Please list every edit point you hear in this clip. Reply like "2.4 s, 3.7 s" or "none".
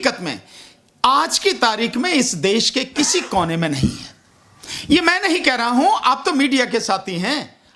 none